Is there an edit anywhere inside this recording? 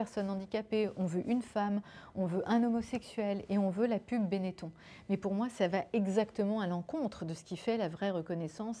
no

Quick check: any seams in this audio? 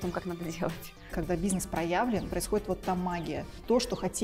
yes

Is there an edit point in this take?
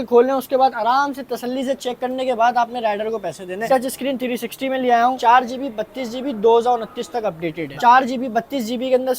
yes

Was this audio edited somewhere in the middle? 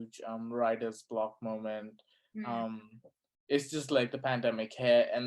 no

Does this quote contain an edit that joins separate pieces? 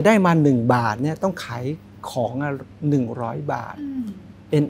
no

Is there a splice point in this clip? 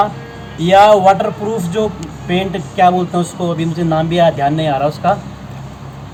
no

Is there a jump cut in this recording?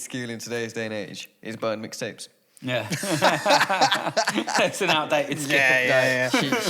no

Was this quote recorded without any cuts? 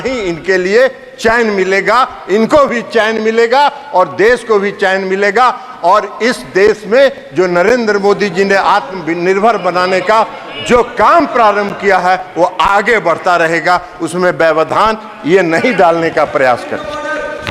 yes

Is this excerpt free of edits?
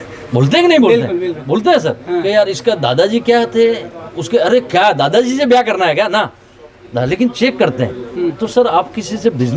yes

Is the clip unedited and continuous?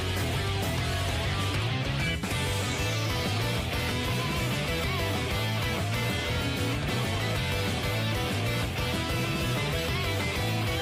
yes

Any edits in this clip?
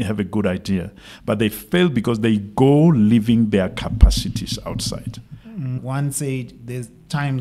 yes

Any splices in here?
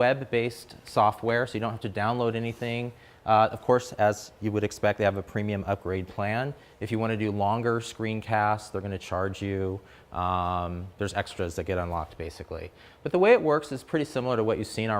no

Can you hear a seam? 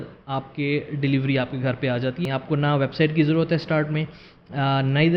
yes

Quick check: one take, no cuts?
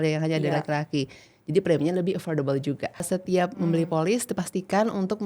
no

